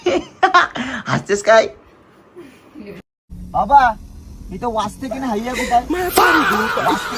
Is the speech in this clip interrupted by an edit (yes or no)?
yes